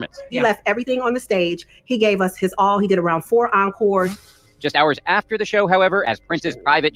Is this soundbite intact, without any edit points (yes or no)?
yes